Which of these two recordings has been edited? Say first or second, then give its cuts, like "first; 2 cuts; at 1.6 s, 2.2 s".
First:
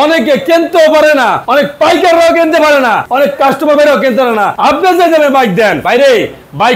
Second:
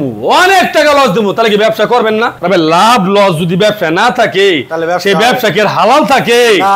first; 4 cuts; at 1.4 s, 3.0 s, 4.5 s, 5.8 s